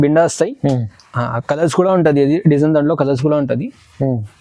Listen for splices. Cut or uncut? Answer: uncut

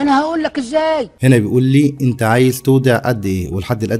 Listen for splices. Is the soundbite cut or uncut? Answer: cut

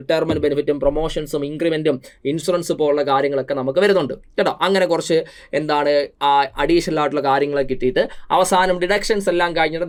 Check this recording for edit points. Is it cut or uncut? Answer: uncut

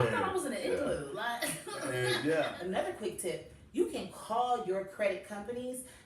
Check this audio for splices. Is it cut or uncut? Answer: cut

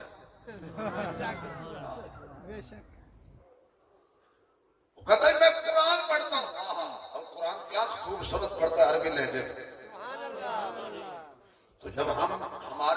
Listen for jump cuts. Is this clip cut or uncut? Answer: uncut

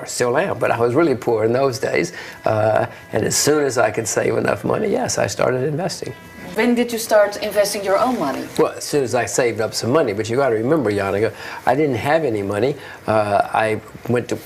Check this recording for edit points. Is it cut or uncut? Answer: cut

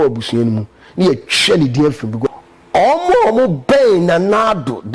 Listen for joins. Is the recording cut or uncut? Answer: cut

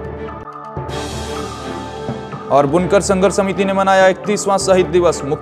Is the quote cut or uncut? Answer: cut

